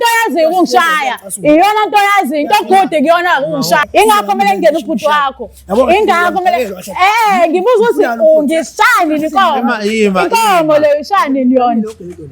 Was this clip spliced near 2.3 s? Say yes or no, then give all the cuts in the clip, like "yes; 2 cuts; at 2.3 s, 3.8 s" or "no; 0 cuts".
no; 1 cut; at 3.9 s